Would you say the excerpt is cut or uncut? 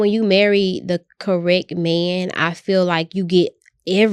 uncut